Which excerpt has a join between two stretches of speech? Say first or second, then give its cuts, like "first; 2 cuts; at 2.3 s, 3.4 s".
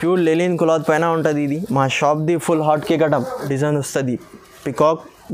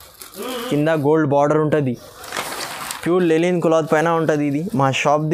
first; 1 cut; at 3.4 s